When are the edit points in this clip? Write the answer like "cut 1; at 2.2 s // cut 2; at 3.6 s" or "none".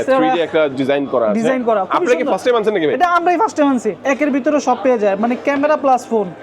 cut 1; at 3.9 s

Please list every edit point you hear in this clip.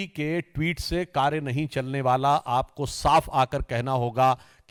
none

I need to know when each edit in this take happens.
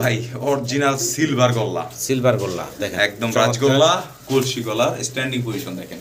none

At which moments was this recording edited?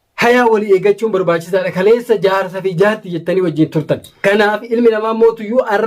cut 1; at 4.1 s

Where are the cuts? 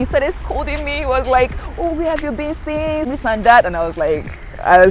cut 1; at 3.1 s

